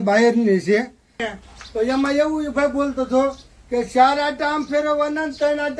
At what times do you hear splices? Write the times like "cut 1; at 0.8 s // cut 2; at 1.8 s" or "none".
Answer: cut 1; at 1.2 s